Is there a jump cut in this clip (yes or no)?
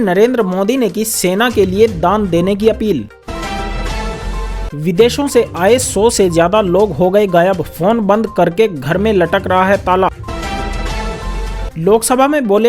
yes